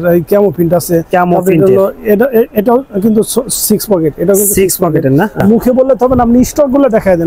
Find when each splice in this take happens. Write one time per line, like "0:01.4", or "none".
0:05.4